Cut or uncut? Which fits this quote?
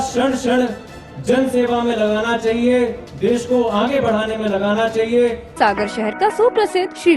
cut